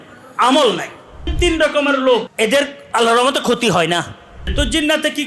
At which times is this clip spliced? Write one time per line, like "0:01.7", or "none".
0:01.3
0:02.3
0:04.5